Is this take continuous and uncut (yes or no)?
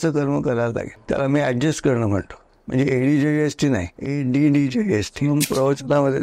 no